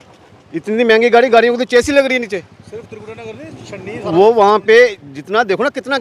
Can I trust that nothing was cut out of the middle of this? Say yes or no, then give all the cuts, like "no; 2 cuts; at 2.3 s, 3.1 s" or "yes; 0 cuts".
yes; 0 cuts